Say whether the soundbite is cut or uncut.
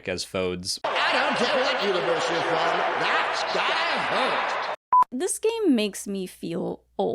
cut